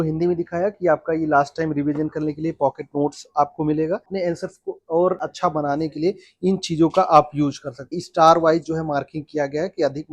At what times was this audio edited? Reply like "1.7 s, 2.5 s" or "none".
4.1 s, 5.2 s, 8.0 s